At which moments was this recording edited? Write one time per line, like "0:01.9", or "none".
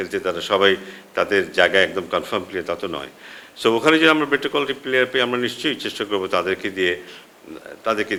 none